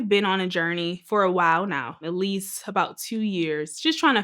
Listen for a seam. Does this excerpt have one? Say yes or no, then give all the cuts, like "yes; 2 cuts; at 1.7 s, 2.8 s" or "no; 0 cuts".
yes; 2 cuts; at 1.0 s, 2.0 s